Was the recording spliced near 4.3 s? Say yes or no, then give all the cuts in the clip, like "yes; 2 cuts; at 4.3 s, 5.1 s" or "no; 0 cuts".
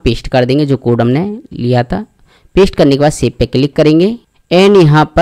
yes; 1 cut; at 4.3 s